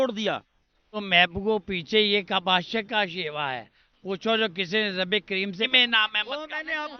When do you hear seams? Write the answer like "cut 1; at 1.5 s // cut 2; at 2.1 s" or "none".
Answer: cut 1; at 1.0 s // cut 2; at 5.7 s